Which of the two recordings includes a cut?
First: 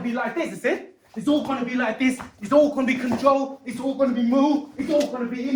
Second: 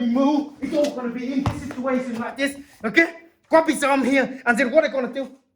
second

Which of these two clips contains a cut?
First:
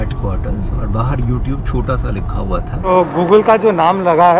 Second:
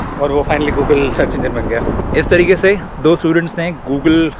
first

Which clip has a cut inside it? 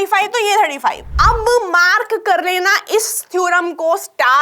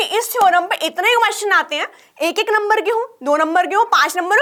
first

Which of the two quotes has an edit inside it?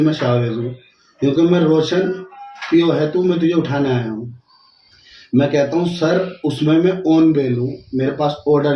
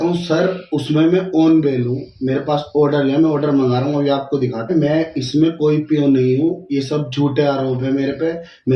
second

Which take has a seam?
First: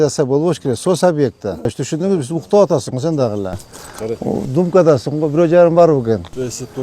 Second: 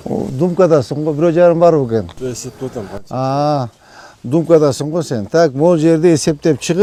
first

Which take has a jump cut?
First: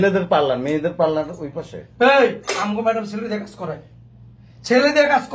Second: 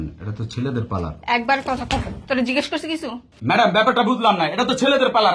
second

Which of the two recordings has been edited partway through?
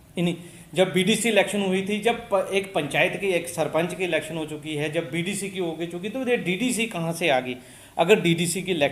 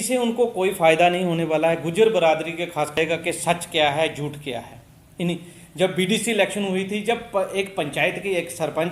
second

